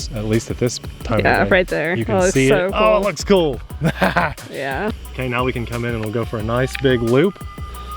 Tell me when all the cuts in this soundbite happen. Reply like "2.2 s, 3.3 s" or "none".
4.9 s